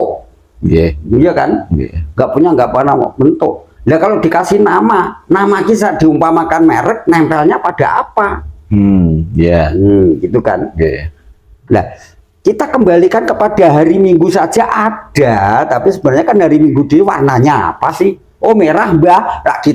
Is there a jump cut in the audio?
no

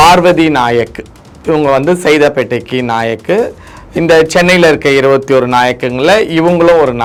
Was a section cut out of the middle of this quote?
no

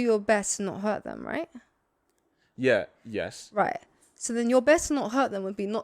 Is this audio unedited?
yes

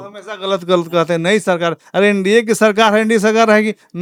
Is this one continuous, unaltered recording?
yes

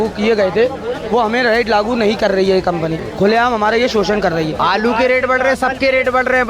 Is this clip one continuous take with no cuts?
no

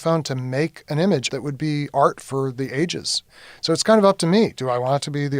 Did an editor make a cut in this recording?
yes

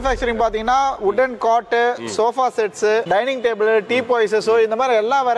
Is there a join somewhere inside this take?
no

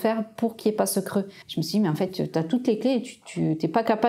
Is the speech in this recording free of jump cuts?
no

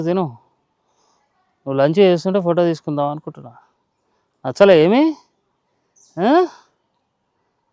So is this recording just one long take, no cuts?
yes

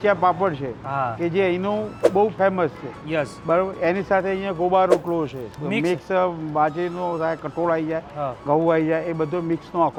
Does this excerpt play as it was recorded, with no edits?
yes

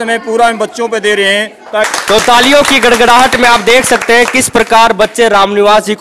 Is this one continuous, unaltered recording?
no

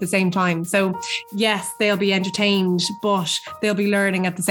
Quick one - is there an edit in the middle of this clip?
no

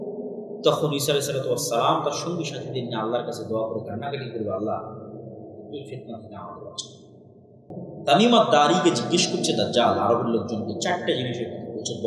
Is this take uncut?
no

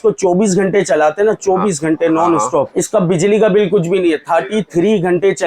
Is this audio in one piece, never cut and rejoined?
no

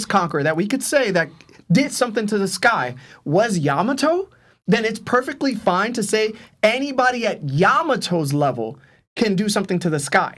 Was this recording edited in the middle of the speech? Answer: no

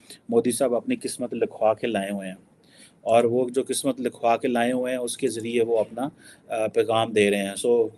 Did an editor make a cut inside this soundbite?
no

